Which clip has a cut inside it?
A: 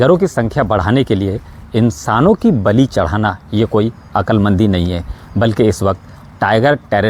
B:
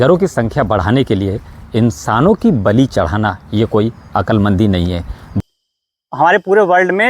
B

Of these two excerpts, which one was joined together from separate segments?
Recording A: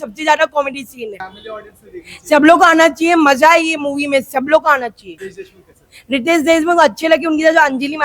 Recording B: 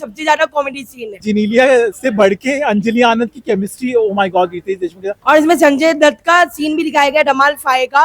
B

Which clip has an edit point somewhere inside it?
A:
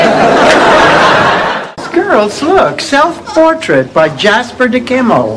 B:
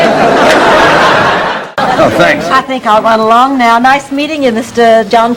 A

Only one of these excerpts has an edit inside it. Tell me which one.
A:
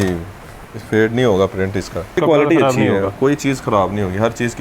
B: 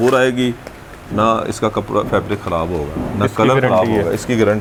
A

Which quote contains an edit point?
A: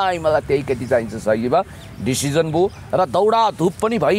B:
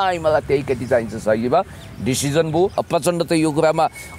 B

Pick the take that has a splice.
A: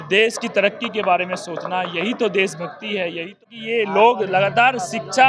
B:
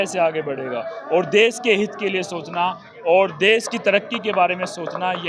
A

